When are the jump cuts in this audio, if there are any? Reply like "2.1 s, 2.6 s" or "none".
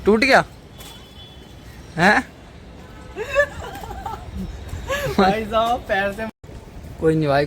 6.3 s